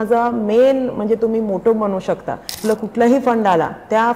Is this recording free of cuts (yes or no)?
no